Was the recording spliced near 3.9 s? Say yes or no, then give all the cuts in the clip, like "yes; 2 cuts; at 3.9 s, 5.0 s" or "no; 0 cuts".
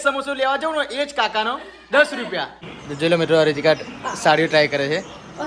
no; 1 cut; at 2.6 s